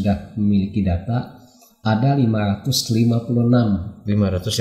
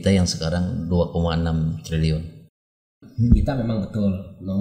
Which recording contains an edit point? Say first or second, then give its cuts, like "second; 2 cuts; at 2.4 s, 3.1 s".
second; 1 cut; at 3.0 s